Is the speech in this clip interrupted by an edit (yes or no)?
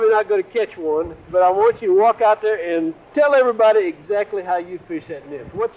yes